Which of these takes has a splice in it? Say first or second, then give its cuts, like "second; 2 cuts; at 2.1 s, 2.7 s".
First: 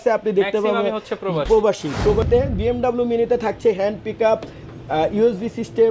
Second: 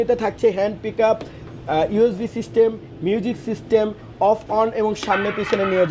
first; 1 cut; at 2.3 s